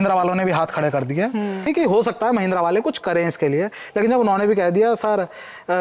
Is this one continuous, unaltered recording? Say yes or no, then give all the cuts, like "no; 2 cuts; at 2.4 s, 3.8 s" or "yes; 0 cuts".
no; 1 cut; at 1.6 s